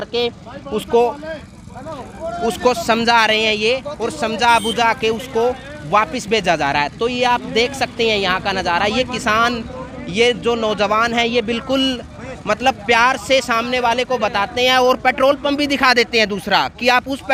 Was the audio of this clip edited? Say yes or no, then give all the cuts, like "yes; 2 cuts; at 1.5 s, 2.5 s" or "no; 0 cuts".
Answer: no; 0 cuts